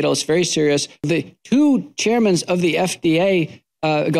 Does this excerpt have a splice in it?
yes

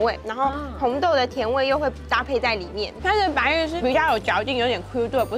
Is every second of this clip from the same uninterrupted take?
no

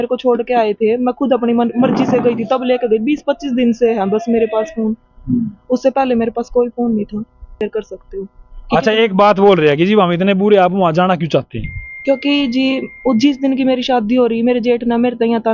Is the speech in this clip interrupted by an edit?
yes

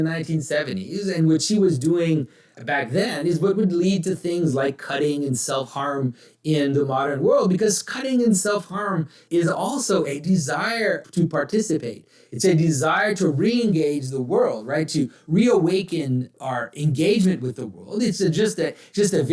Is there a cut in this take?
yes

